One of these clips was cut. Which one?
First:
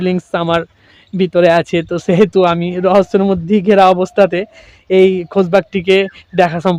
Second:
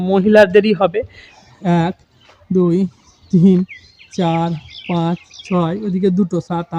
second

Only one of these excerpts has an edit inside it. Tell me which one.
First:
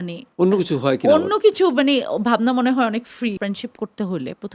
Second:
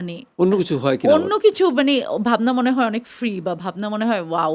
first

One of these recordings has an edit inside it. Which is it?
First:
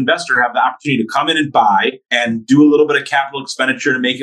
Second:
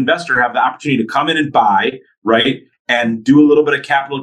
first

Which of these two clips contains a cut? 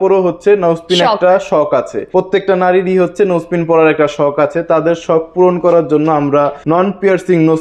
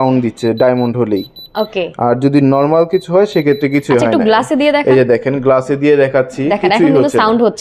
first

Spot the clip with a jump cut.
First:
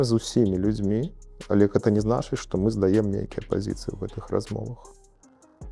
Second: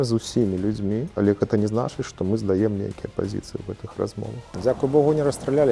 second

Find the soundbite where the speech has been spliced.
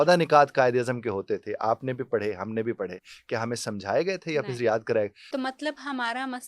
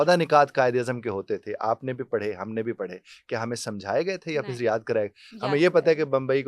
first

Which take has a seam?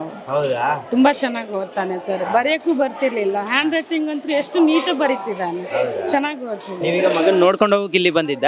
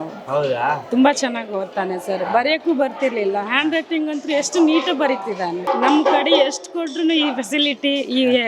second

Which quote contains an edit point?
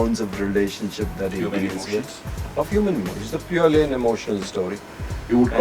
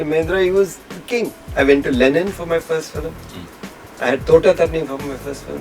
second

